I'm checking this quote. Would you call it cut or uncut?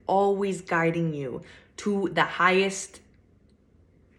uncut